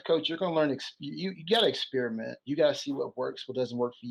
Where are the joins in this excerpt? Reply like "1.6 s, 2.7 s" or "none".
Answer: none